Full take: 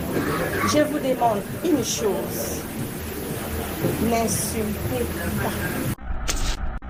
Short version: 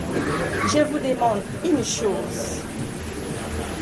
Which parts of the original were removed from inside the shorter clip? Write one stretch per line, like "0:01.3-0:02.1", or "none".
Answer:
none